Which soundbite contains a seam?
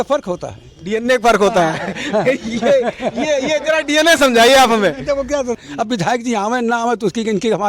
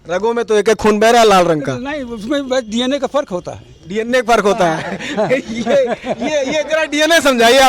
first; 1 cut; at 5.6 s

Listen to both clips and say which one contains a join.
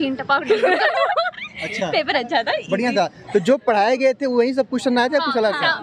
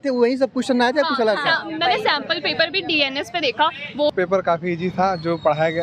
second; 1 cut; at 4.1 s

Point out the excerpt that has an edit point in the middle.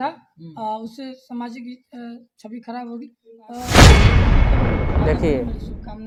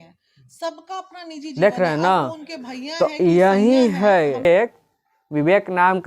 second; 2 cuts; at 1.6 s, 4.4 s

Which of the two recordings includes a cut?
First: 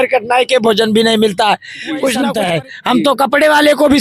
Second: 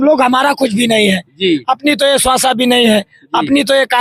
first; 1 cut; at 2.3 s

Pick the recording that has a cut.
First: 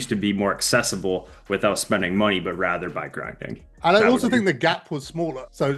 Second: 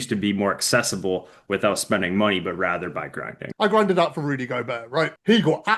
second; 1 cut; at 3.4 s

